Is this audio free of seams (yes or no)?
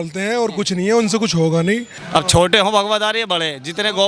no